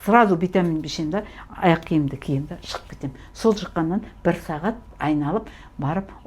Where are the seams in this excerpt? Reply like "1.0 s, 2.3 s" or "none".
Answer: 4.9 s